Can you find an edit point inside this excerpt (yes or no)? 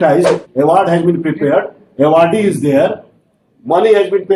no